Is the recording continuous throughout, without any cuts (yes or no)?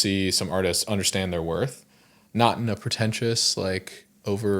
yes